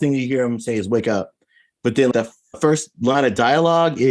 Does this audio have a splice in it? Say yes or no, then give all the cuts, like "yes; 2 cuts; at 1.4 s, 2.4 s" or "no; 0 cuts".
yes; 1 cut; at 2.7 s